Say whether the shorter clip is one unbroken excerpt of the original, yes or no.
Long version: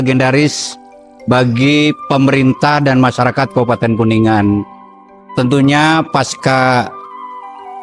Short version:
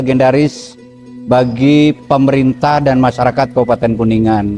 yes